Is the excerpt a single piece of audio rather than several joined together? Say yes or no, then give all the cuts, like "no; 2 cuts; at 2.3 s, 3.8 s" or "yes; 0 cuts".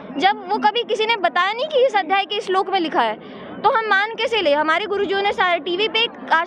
yes; 0 cuts